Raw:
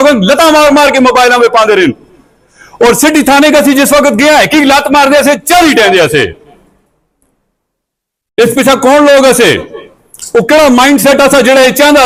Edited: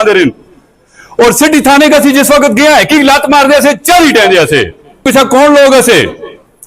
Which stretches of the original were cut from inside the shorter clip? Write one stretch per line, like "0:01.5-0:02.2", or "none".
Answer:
0:06.6-0:08.5

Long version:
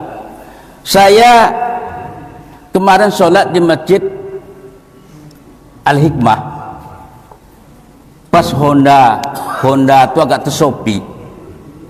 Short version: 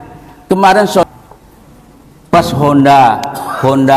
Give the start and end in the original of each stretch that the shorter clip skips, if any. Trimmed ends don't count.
0:03.3-0:07.0

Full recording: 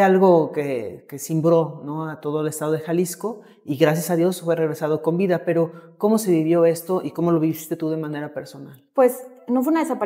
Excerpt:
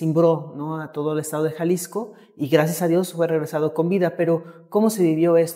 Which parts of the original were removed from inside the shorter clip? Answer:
none

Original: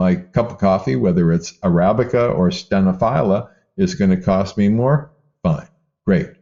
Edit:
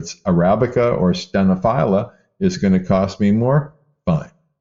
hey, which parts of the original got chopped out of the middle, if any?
none

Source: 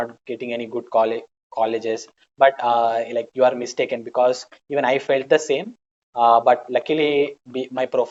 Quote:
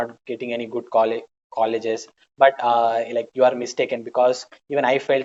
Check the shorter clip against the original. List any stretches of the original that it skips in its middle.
none

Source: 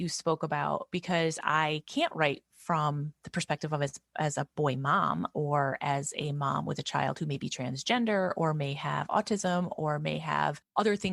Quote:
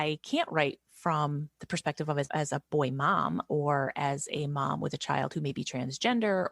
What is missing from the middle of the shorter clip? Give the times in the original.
0:03.9-0:04.1

